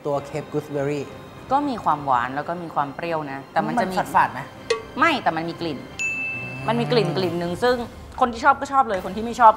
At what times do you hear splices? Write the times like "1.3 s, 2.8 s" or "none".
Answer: none